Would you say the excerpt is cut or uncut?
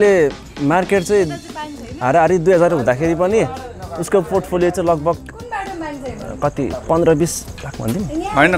uncut